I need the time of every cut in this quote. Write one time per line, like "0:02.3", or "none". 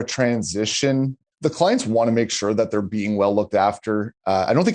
0:01.3